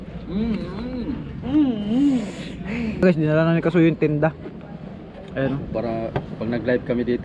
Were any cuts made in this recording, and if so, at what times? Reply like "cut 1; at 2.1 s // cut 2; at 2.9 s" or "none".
cut 1; at 3.0 s